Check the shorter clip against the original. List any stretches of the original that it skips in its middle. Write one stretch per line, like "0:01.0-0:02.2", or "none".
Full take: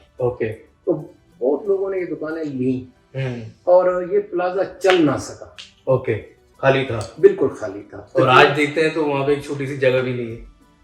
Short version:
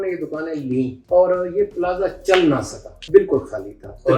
0:02.9-0:03.5
0:05.5-0:07.0